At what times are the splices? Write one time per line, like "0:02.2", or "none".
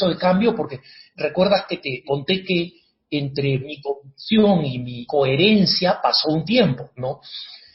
0:02.0
0:04.9